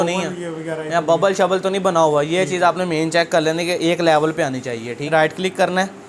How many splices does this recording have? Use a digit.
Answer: 1